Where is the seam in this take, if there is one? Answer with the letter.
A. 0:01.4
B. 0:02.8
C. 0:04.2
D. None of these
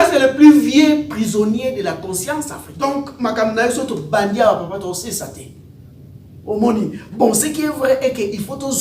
B